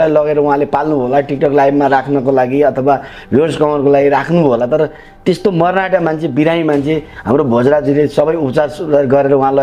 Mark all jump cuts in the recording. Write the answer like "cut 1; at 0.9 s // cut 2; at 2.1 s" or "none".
none